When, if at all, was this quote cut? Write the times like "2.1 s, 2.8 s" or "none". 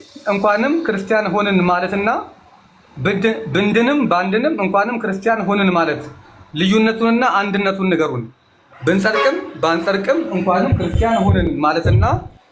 none